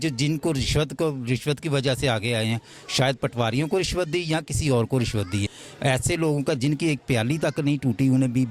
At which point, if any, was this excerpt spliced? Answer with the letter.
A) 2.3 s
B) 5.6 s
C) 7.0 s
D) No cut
B